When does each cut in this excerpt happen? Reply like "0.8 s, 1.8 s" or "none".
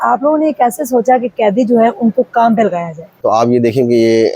3.2 s